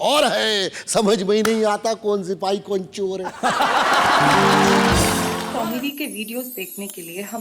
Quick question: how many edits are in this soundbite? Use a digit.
1